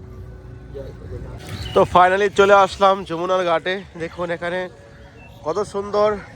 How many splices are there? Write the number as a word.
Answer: one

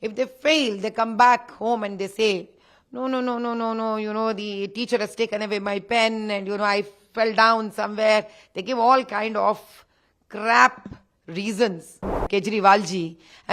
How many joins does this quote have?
one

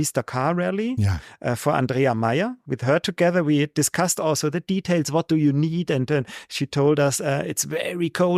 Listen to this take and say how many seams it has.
zero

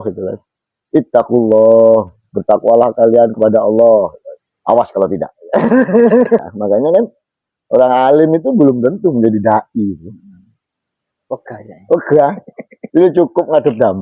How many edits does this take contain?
one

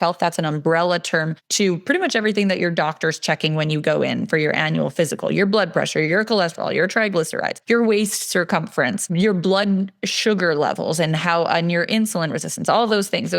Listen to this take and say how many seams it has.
three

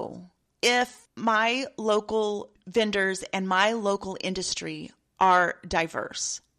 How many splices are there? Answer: two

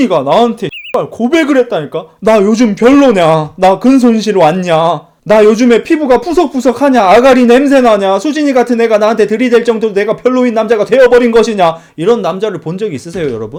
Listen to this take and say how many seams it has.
zero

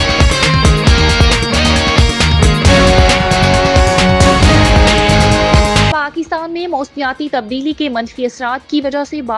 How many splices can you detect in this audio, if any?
two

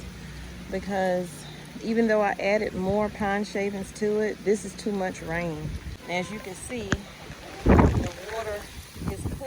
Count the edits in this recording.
one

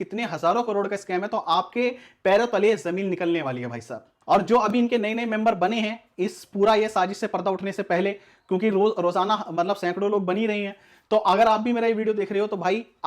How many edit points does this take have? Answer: one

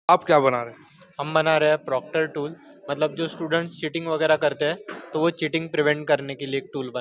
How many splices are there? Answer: zero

